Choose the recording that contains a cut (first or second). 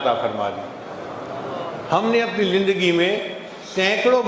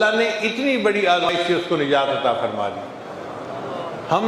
second